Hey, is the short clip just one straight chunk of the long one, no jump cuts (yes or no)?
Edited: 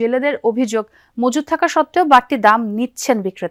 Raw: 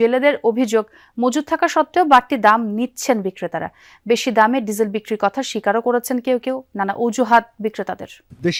yes